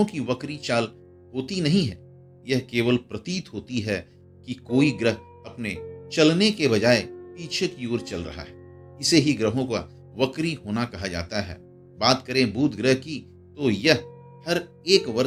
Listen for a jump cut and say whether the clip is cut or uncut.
uncut